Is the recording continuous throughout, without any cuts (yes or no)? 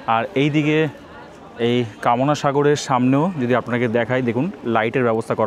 yes